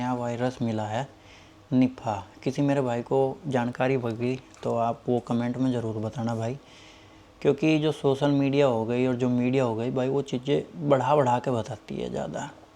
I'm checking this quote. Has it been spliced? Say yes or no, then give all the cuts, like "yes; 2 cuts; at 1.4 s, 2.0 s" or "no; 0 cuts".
no; 0 cuts